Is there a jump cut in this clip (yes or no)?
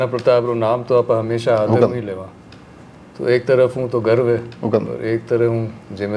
no